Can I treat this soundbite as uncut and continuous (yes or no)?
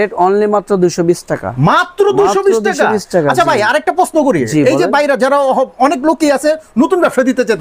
yes